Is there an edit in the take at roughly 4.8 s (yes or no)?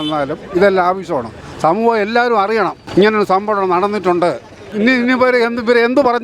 yes